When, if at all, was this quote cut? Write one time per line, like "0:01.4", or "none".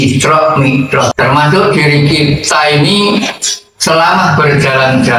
0:01.1